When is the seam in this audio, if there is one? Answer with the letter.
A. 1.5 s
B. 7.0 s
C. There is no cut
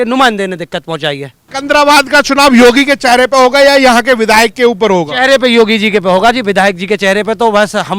A